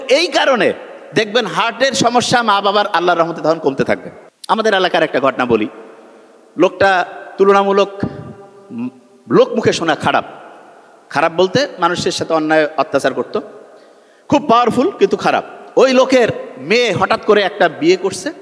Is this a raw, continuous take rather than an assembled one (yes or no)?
yes